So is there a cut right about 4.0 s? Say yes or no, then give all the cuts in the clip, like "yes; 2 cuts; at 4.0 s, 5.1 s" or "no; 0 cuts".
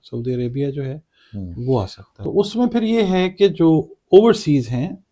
no; 1 cut; at 2.0 s